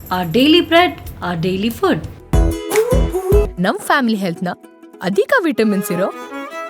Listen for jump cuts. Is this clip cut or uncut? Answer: cut